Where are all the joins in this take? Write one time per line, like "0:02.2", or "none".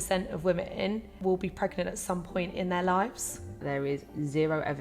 0:01.1
0:03.6